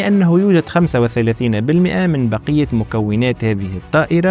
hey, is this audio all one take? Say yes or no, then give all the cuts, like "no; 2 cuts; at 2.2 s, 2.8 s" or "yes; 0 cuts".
yes; 0 cuts